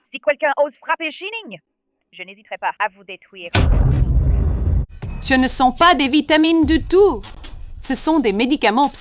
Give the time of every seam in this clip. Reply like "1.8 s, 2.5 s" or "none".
4.8 s

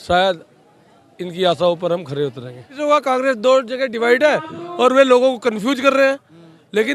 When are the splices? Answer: 2.7 s

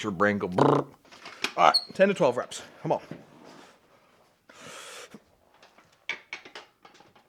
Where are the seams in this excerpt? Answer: none

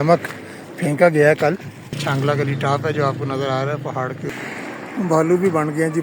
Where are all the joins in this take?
2.0 s, 4.3 s

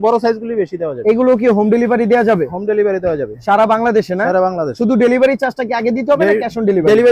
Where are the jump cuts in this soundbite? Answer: none

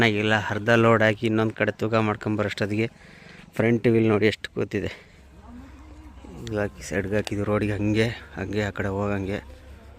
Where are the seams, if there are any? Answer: 5.3 s

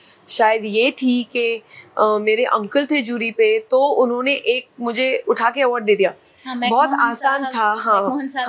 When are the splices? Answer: none

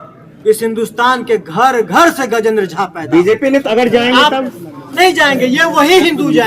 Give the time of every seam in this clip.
3.6 s

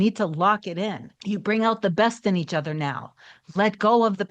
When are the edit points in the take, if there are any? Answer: 1.1 s

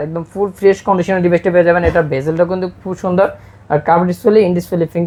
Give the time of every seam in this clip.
none

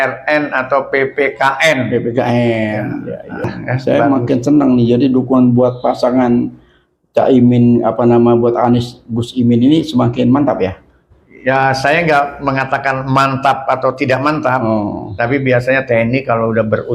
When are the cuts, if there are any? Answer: 3.5 s

